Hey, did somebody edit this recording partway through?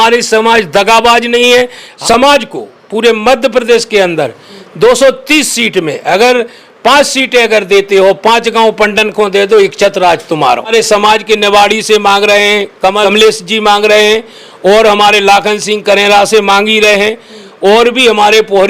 yes; 3 cuts; at 1.8 s, 10.7 s, 12.9 s

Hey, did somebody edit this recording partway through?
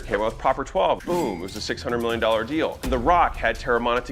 yes; 2 cuts; at 1.0 s, 2.9 s

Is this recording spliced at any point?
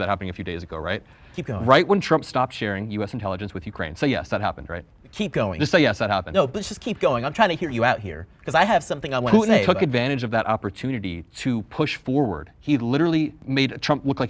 yes; 1 cut; at 13.4 s

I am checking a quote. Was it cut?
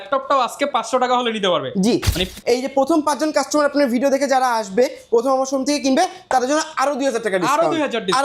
yes; 1 cut; at 2.2 s

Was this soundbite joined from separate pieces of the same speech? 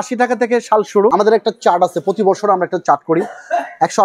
yes; 1 cut; at 1.1 s

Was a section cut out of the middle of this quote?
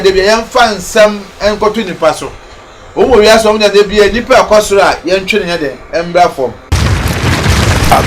yes; 1 cut; at 6.7 s

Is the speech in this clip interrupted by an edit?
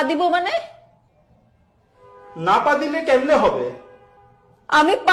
no; 0 cuts

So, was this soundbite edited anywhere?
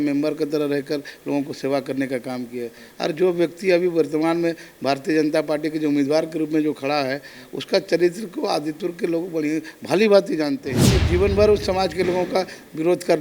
no; 0 cuts

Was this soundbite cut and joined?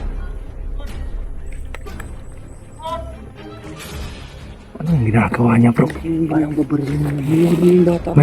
yes; 2 cuts; at 1.0 s, 4.7 s

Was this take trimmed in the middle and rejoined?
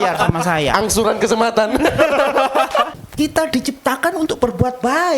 yes; 1 cut; at 2.9 s

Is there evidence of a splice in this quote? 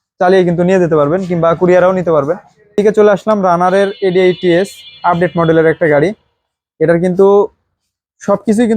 yes; 1 cut; at 2.8 s

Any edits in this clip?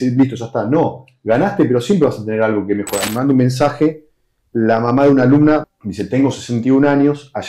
yes; 2 cuts; at 3.0 s, 5.7 s

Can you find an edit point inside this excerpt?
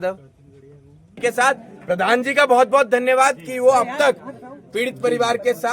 yes; 1 cut; at 1.2 s

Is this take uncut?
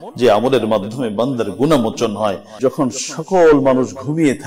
no; 1 cut; at 2.6 s

